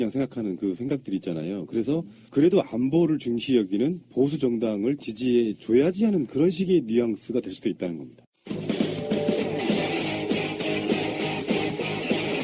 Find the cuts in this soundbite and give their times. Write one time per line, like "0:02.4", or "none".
0:05.8